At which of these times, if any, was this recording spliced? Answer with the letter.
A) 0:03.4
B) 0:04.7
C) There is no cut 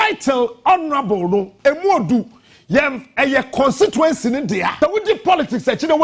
B